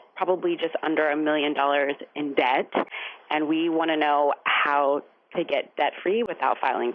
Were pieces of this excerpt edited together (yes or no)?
no